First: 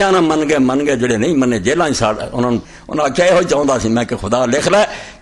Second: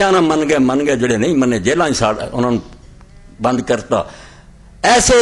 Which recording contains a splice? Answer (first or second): first